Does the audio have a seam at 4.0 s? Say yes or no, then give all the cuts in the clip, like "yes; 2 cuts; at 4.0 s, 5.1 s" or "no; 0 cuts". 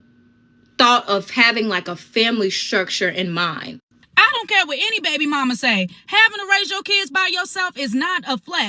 yes; 1 cut; at 4.0 s